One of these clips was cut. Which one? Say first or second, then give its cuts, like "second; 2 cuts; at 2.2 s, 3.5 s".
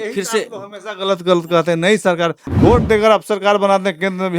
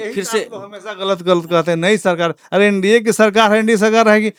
first; 1 cut; at 2.4 s